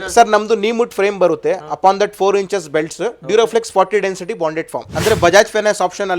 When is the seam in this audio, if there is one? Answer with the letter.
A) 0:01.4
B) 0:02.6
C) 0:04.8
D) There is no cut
C